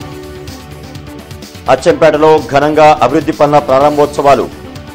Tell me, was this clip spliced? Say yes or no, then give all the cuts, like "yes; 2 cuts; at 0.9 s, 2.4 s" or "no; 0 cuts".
yes; 1 cut; at 1.6 s